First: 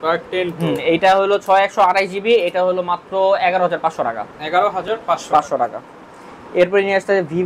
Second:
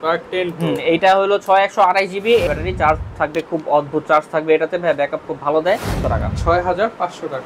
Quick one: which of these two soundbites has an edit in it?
second; 2 cuts; at 2.5 s, 6.0 s

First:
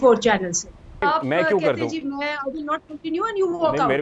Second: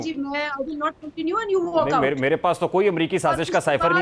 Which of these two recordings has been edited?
first; 1 cut; at 1.0 s

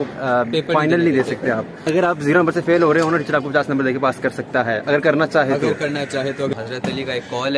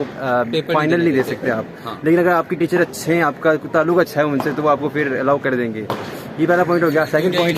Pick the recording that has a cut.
first; 2 cuts; at 1.7 s, 6.5 s

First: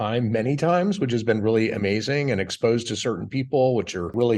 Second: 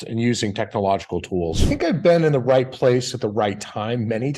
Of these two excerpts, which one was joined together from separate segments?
second; 1 cut; at 1.7 s

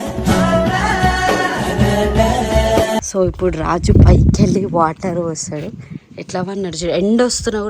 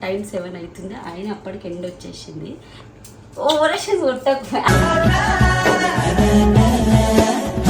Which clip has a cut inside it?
first; 1 cut; at 3.1 s

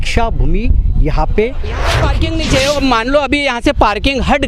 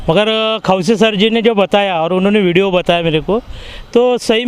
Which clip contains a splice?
first; 1 cut; at 2.0 s

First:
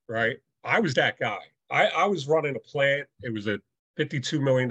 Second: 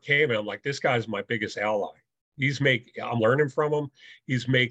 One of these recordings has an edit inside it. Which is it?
first; 1 cut; at 3.8 s

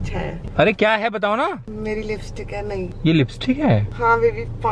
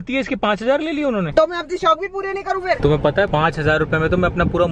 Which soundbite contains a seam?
second; 2 cuts; at 1.3 s, 2.8 s

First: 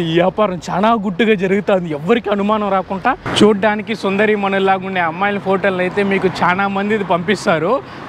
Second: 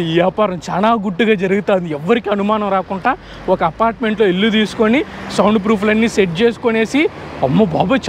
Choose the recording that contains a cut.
first; 1 cut; at 3.2 s

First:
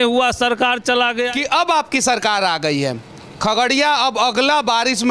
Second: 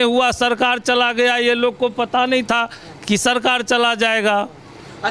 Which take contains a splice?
first; 1 cut; at 1.3 s

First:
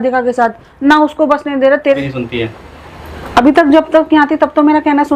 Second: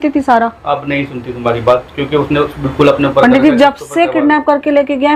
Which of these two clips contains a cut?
first; 1 cut; at 1.9 s

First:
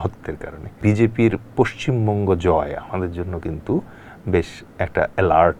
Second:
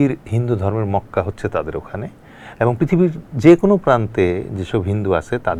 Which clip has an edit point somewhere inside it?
first; 2 cuts; at 0.8 s, 4.6 s

